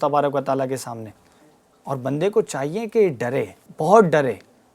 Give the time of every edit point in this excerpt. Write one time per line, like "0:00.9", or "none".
0:03.6